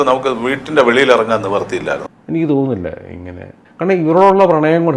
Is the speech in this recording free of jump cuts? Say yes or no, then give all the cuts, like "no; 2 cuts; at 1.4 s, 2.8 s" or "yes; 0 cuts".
no; 1 cut; at 2.0 s